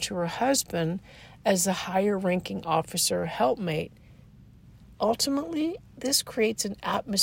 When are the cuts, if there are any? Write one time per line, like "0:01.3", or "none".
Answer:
none